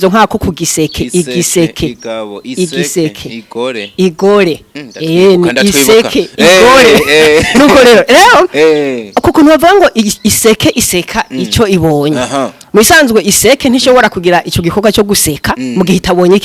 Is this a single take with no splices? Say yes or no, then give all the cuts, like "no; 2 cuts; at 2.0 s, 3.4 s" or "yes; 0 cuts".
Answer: yes; 0 cuts